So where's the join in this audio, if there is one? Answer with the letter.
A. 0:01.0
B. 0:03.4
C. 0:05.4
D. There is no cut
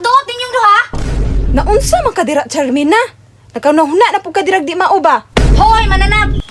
C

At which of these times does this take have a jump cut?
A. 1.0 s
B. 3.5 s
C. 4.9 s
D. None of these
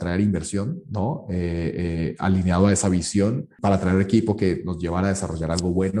B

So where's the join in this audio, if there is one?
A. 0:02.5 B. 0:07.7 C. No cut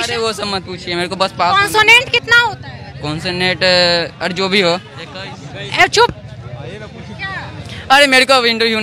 C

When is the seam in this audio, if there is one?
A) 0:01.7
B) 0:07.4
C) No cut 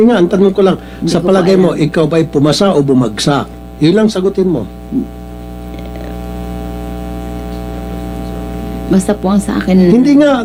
C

